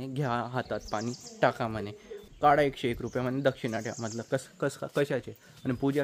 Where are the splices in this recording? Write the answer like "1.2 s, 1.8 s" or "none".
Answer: 2.2 s